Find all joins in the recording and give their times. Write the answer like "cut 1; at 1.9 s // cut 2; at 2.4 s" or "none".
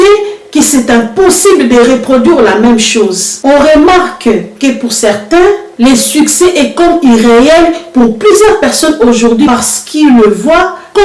none